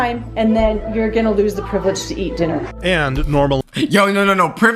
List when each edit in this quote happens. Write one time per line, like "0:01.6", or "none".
none